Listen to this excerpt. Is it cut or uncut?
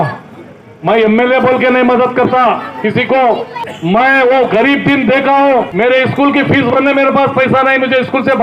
cut